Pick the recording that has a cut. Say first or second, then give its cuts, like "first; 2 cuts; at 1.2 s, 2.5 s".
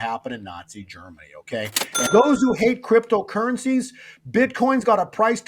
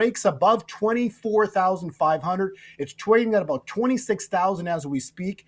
first; 1 cut; at 2.1 s